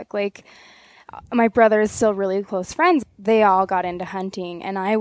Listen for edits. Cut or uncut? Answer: cut